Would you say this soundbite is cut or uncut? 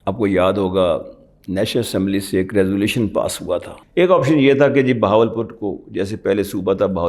cut